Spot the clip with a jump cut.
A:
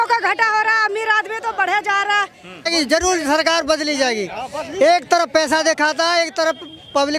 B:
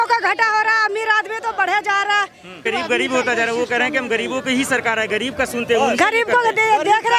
A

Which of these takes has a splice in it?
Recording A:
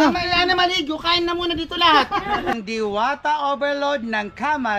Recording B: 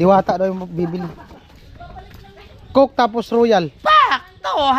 A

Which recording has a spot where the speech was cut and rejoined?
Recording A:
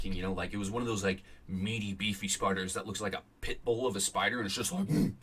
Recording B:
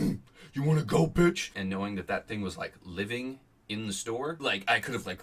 B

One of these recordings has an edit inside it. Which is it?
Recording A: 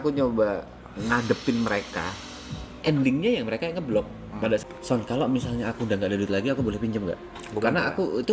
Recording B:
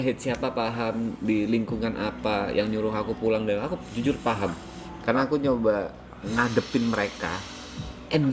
A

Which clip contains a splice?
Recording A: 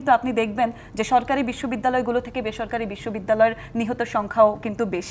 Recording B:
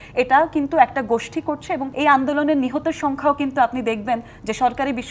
B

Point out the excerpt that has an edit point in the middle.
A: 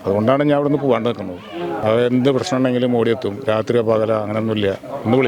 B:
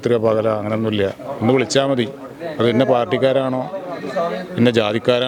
A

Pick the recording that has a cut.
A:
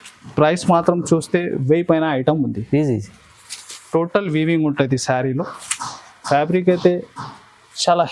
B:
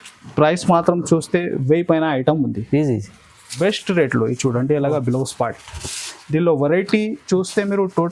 B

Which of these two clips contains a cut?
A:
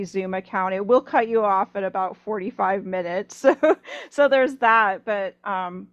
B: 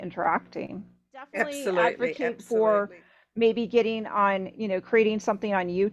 B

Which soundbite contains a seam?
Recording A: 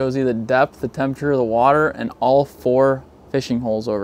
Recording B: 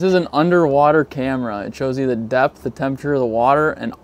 A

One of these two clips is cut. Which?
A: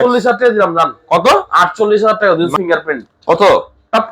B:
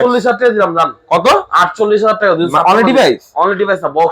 A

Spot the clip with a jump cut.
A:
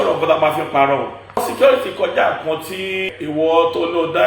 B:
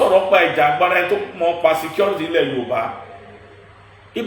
A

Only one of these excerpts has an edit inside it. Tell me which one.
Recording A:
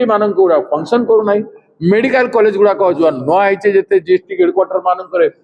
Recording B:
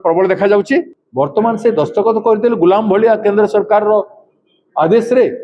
B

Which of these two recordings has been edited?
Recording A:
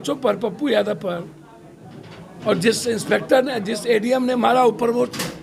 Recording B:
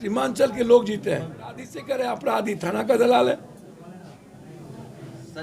B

